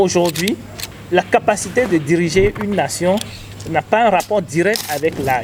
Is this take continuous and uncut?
yes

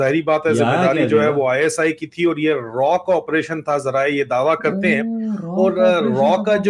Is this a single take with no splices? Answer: yes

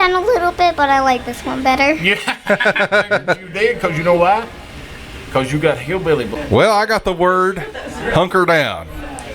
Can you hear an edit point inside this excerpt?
yes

